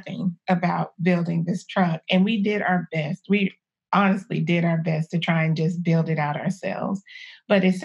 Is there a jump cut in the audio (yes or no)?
no